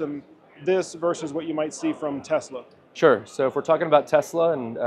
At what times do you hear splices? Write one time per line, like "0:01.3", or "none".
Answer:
none